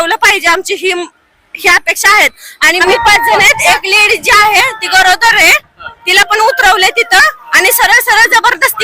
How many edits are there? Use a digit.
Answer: 1